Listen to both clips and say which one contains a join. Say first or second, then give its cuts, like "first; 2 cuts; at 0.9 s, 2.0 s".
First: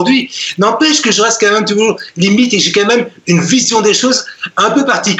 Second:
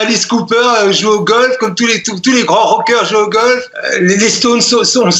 second; 1 cut; at 3.8 s